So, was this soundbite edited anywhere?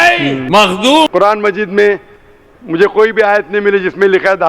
yes; 1 cut; at 1.1 s

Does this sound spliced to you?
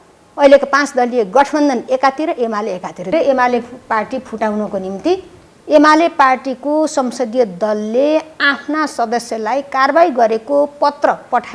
yes; 1 cut; at 3.1 s

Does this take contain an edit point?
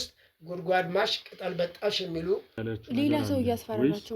yes; 1 cut; at 2.6 s

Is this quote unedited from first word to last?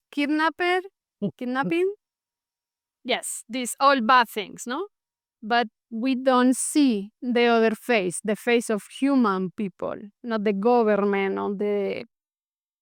yes; 0 cuts

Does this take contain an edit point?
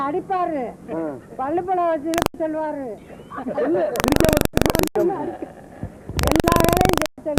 no; 0 cuts

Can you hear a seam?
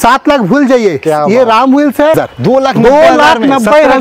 yes; 1 cut; at 2.1 s

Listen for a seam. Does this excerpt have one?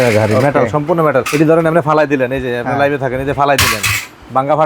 yes; 1 cut; at 1.3 s

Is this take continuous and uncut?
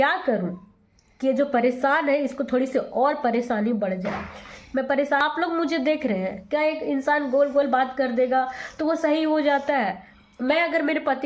no; 1 cut; at 5.2 s

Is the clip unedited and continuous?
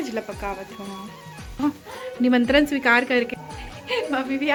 yes; 0 cuts

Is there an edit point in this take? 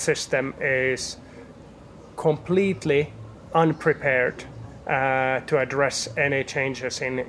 no; 0 cuts

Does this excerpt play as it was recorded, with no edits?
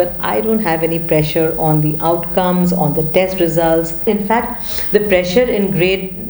no; 1 cut; at 4.0 s

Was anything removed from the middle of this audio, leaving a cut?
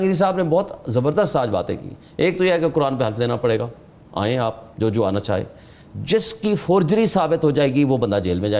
no; 0 cuts

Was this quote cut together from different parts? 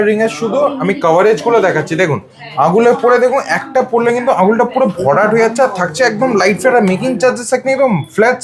no; 0 cuts

